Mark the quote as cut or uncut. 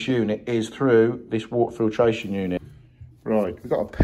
cut